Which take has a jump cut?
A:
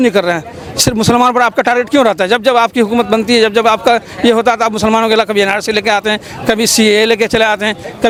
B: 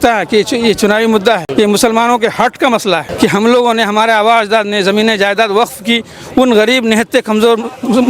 B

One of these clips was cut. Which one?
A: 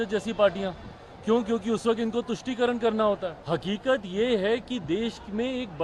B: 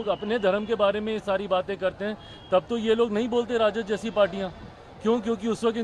A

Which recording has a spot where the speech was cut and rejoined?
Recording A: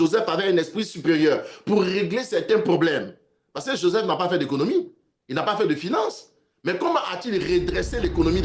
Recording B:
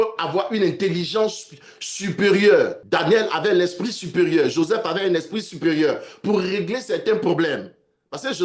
B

